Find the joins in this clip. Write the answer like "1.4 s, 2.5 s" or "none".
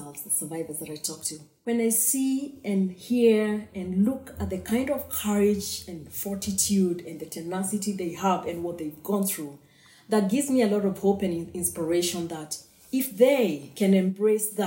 1.4 s